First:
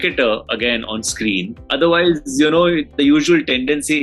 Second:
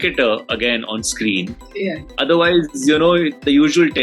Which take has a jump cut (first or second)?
first